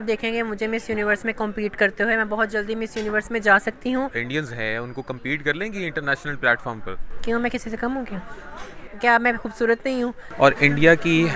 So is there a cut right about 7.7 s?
no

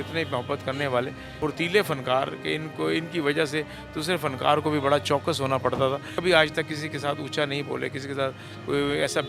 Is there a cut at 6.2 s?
yes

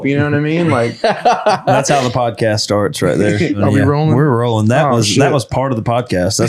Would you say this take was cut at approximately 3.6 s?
yes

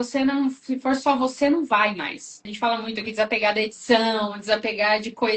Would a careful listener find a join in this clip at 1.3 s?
no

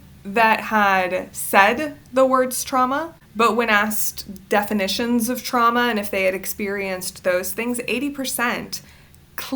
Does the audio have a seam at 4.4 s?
no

